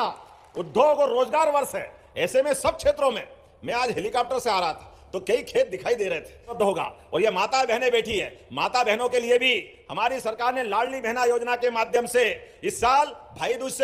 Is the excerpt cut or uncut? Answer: cut